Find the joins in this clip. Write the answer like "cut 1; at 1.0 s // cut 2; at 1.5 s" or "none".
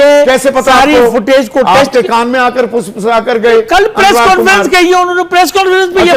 none